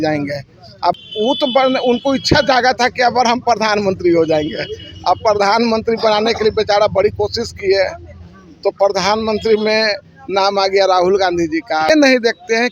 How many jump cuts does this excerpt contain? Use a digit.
2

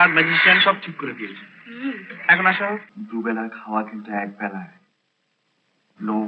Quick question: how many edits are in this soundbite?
1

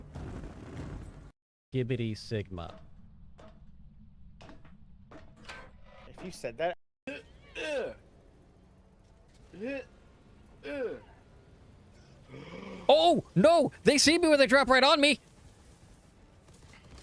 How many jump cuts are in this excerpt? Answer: 0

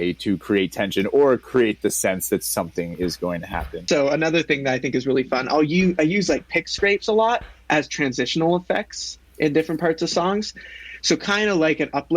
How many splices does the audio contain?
1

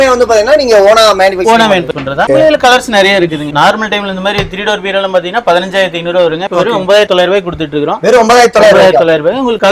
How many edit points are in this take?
1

